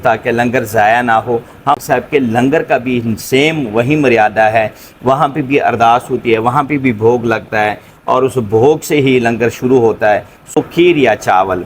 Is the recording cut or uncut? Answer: cut